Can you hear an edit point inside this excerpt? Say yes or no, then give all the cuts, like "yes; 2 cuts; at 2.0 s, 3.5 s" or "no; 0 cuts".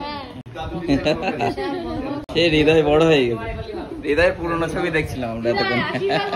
no; 0 cuts